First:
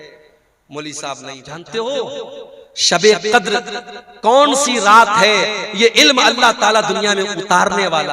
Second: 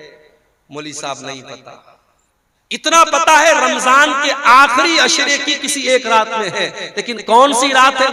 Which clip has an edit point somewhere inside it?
first; 1 cut; at 1.5 s

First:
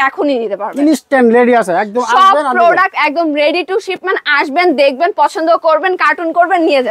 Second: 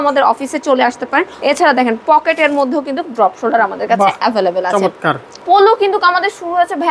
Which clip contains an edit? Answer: second; 2 cuts; at 1.3 s, 5.3 s

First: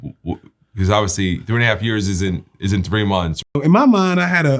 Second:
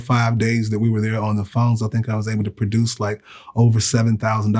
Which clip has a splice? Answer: first; 1 cut; at 3.5 s

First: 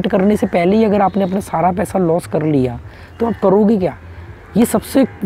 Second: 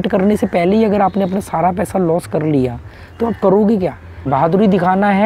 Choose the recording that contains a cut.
second; 1 cut; at 4.3 s

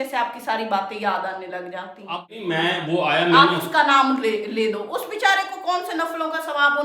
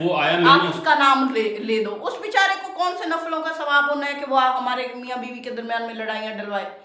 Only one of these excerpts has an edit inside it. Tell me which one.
first; 1 cut; at 1.9 s

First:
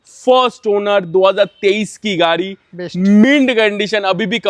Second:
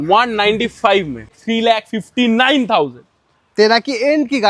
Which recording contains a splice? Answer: second; 1 cut; at 1.3 s

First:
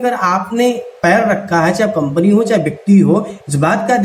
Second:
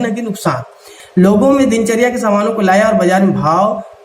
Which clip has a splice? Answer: second; 1 cut; at 0.9 s

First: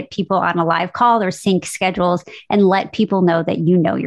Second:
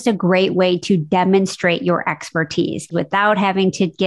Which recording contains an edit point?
second; 1 cut; at 2.9 s

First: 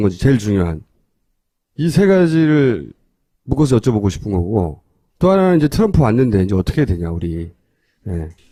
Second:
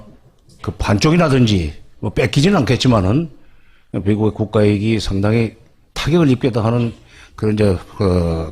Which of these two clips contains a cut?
second; 1 cut; at 7.0 s

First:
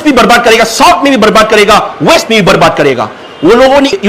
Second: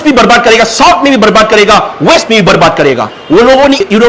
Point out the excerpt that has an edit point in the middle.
second; 1 cut; at 3.1 s

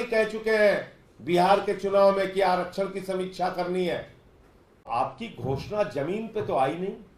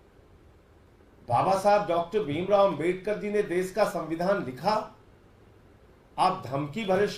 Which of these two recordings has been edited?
first; 1 cut; at 4.9 s

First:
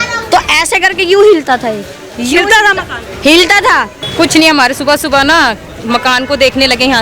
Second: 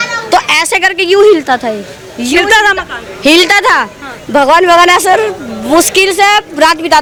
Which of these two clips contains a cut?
first; 1 cut; at 4.0 s

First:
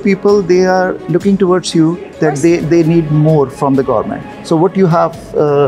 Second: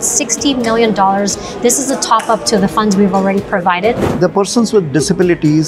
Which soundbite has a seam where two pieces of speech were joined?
second; 1 cut; at 4.1 s

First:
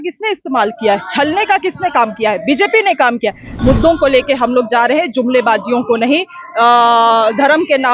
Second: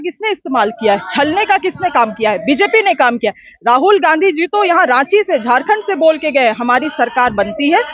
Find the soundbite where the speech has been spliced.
first; 1 cut; at 3.5 s

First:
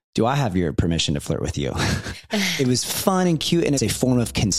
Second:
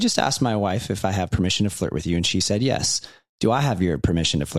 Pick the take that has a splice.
first; 2 cuts; at 2.5 s, 3.8 s

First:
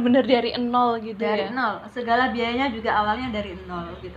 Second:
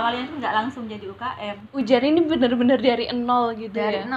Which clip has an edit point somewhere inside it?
second; 1 cut; at 1.6 s

